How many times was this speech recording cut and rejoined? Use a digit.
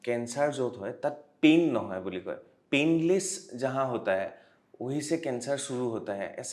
0